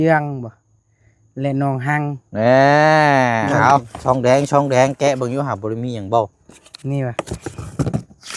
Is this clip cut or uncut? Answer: cut